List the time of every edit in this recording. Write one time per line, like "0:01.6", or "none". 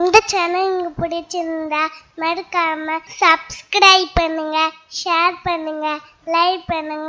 0:03.1